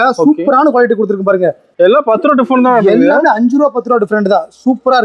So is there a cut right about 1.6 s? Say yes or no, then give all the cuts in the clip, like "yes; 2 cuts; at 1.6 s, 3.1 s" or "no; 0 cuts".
yes; 1 cut; at 1.6 s